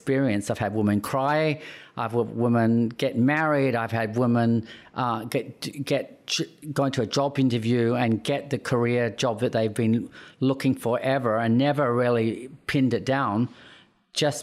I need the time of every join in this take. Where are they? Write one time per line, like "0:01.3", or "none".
none

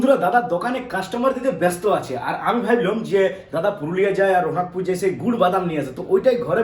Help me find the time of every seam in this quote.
none

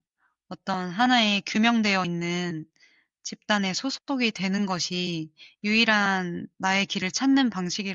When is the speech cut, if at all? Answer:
none

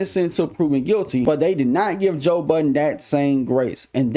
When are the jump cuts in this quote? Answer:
0:01.2

